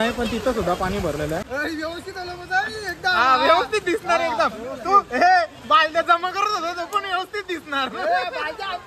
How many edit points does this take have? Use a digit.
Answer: 1